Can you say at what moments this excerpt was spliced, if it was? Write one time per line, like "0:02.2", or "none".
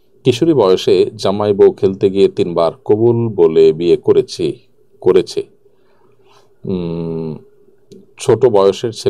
none